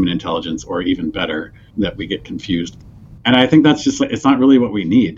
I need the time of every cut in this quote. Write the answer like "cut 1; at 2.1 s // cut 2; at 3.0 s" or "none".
cut 1; at 1.6 s // cut 2; at 2.7 s

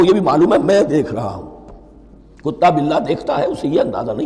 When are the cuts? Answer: none

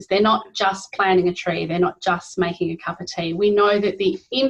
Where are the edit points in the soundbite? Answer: none

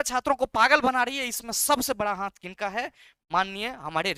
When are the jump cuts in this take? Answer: none

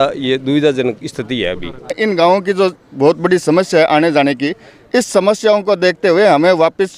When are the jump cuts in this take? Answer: cut 1; at 1.9 s

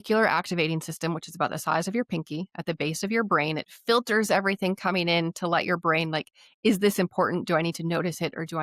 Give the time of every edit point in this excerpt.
none

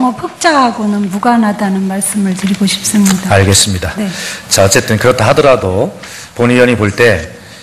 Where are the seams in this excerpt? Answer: cut 1; at 1.1 s

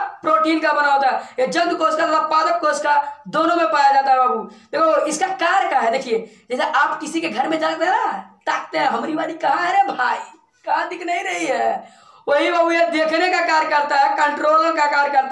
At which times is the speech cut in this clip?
none

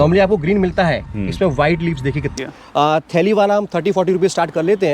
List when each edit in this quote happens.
cut 1; at 2.3 s

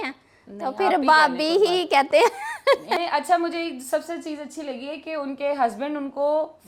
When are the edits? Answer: cut 1; at 3.0 s

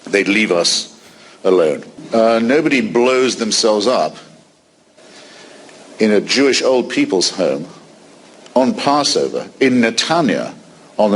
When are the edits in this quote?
cut 1; at 1.9 s

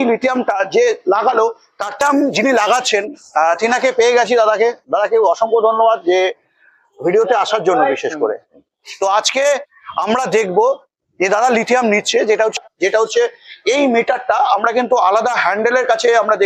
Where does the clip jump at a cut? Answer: cut 1; at 2.0 s // cut 2; at 12.6 s

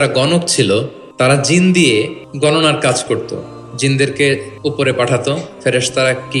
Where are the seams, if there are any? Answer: cut 1; at 1.0 s // cut 2; at 1.8 s // cut 3; at 4.5 s

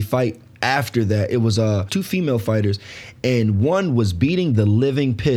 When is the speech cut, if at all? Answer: cut 1; at 1.9 s

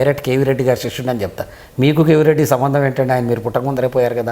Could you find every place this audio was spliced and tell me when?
none

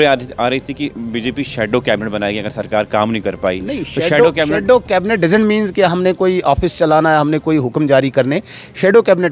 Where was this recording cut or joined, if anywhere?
none

